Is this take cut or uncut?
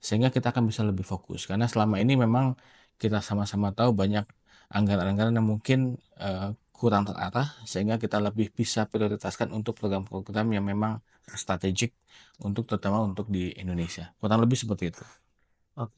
uncut